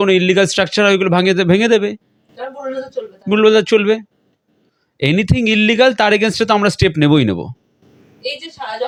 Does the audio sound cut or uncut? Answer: uncut